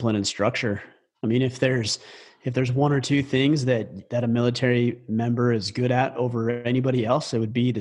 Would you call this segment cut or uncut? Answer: uncut